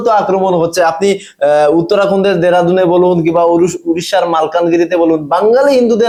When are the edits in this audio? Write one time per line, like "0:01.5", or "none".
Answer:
none